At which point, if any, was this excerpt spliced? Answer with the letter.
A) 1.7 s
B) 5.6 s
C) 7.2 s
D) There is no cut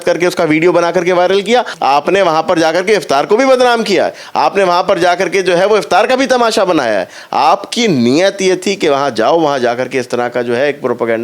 A